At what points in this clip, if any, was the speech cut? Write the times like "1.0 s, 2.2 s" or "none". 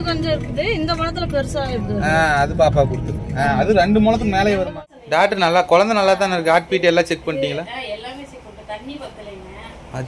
4.7 s